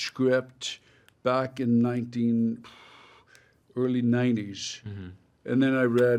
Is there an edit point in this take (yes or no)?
no